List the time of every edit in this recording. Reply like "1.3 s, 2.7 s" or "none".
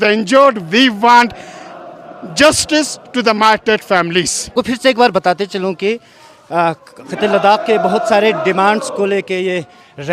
4.5 s